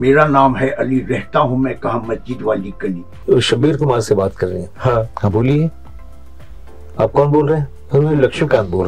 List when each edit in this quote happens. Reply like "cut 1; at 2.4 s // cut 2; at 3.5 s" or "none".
cut 1; at 3.2 s